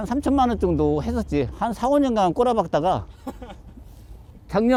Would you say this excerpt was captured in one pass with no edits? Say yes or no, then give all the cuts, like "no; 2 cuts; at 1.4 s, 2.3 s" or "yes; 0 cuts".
yes; 0 cuts